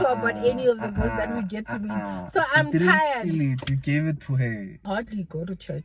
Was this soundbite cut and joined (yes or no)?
yes